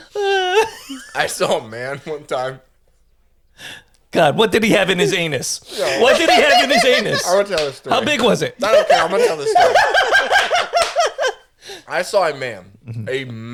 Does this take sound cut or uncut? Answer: uncut